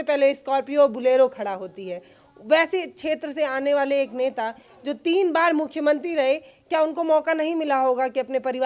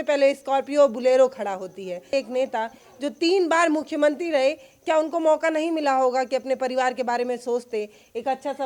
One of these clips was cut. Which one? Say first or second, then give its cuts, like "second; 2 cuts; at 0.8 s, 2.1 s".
second; 1 cut; at 2.1 s